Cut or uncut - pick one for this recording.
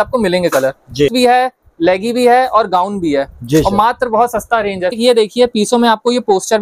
cut